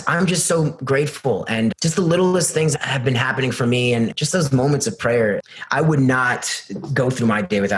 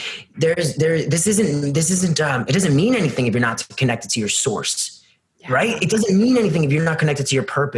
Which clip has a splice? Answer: first; 4 cuts; at 1.7 s, 2.7 s, 4.1 s, 5.4 s

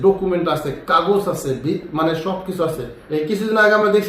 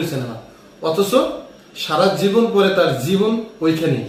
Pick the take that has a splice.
first; 1 cut; at 2.9 s

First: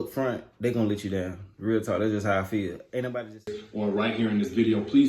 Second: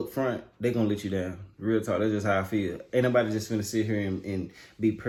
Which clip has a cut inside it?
first; 1 cut; at 3.5 s

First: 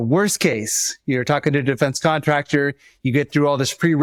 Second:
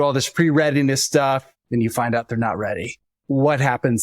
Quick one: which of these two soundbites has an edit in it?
second; 2 cuts; at 1.5 s, 3.1 s

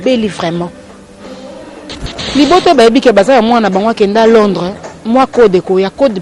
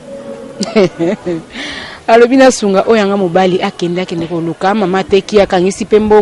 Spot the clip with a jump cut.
first; 1 cut; at 2.2 s

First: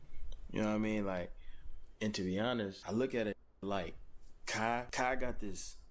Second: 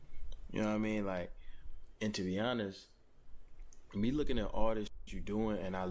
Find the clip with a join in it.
first; 2 cuts; at 2.8 s, 4.9 s

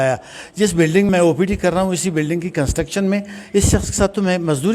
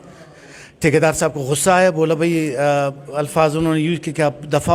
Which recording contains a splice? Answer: first; 1 cut; at 1.1 s

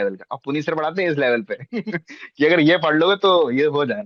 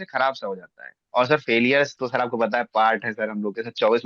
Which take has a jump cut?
second; 2 cuts; at 1.0 s, 2.0 s

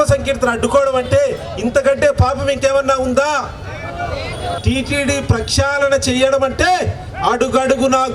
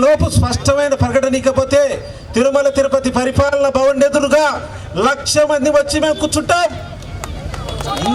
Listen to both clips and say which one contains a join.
first; 1 cut; at 4.6 s

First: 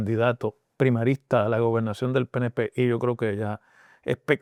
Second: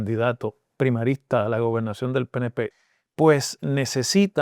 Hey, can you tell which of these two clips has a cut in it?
second; 1 cut; at 2.7 s

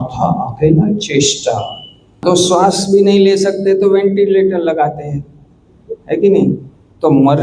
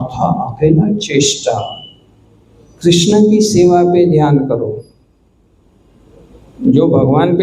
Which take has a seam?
first; 1 cut; at 2.2 s

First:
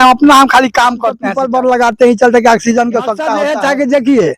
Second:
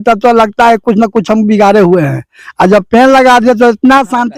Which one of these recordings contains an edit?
first; 2 cuts; at 1.3 s, 3.3 s

